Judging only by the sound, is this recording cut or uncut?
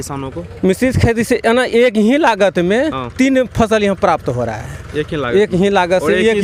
uncut